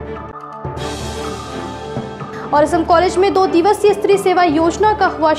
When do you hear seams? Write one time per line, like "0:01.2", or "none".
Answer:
0:02.1